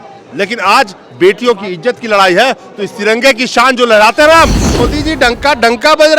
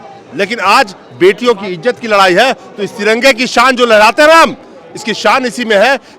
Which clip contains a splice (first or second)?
first